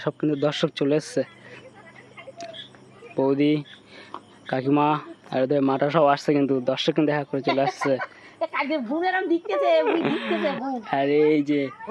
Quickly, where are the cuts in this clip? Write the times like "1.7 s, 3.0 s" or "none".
none